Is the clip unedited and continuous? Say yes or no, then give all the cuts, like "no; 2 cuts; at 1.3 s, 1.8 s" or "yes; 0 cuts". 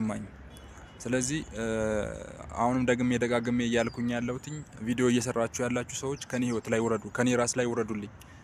yes; 0 cuts